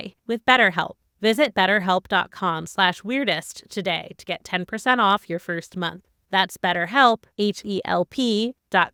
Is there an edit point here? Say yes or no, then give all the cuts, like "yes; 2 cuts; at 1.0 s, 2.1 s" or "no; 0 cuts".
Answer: no; 0 cuts